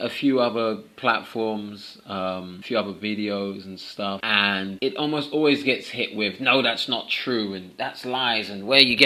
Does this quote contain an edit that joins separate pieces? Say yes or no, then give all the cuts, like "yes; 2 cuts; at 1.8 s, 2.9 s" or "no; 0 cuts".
no; 0 cuts